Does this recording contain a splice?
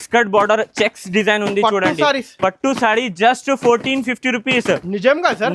no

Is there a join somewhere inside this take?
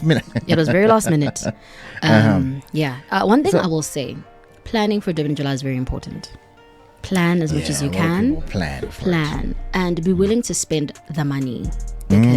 no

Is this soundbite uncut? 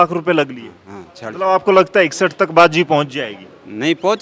yes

